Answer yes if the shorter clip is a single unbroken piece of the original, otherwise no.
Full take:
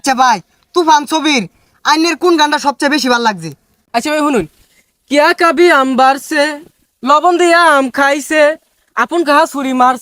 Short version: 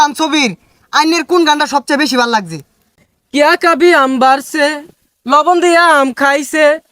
no